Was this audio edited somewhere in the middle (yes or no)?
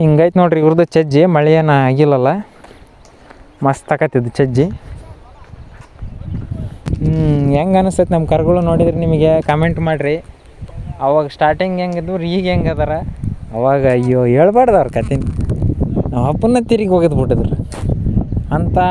yes